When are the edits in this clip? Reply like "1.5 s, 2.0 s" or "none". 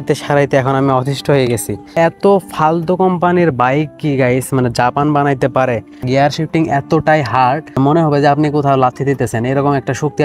1.9 s, 6.0 s, 7.8 s